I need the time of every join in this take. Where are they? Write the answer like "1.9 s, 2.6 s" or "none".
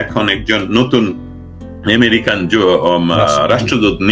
none

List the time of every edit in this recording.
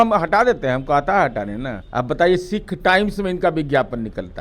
1.8 s

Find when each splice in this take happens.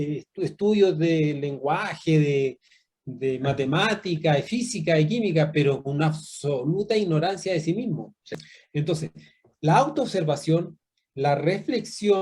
8.3 s

